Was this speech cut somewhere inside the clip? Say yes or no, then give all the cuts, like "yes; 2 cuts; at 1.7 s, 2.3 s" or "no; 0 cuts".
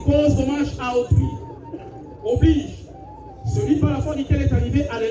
no; 0 cuts